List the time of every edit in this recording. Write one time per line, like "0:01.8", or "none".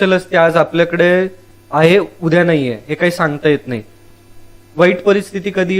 none